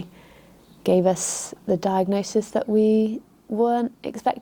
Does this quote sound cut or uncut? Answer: uncut